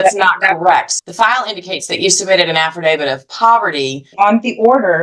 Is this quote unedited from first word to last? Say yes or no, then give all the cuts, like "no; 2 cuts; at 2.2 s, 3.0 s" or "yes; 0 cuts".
no; 2 cuts; at 0.9 s, 4.1 s